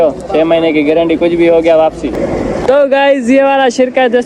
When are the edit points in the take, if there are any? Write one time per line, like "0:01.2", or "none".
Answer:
0:02.2